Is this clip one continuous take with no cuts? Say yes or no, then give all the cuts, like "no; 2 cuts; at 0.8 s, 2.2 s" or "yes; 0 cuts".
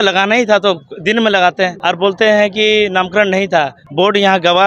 no; 2 cuts; at 1.8 s, 3.8 s